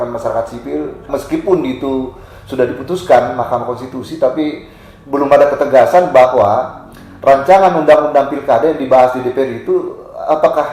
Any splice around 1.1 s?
yes; 1 cut; at 1.1 s

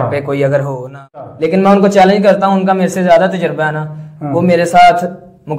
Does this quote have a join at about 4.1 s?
no; 1 cut; at 1.3 s

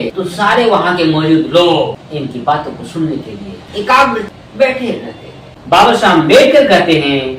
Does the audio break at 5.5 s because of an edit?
yes; 1 cut; at 5.5 s

